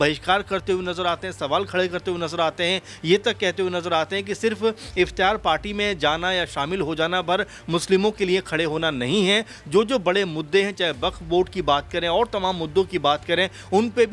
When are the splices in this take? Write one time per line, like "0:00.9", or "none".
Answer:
none